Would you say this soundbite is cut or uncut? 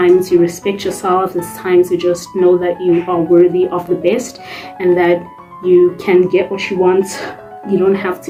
uncut